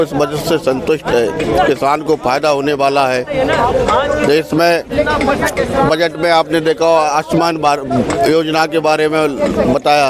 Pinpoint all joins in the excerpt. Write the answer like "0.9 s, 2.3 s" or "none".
none

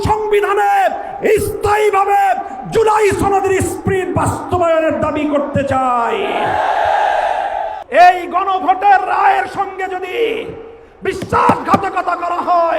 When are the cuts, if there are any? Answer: 7.8 s

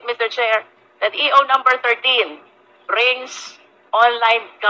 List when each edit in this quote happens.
none

